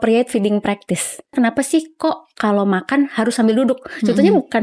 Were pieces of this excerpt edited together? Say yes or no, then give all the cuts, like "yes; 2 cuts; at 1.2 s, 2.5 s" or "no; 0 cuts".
yes; 1 cut; at 1.3 s